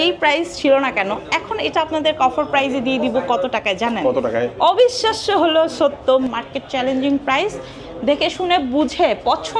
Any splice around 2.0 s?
no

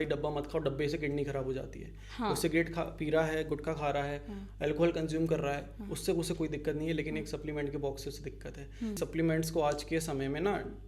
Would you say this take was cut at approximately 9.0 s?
yes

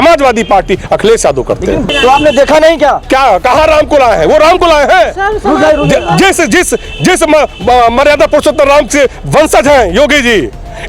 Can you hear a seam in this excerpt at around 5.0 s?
no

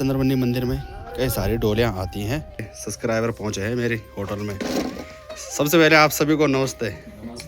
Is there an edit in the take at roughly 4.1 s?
no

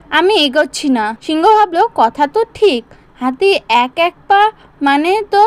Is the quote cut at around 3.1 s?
no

